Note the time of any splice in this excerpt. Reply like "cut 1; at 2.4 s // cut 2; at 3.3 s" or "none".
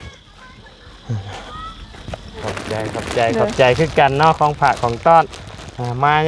cut 1; at 2.4 s